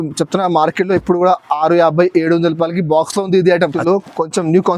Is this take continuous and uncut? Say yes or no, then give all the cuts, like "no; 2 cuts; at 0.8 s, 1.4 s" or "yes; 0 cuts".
no; 1 cut; at 3.8 s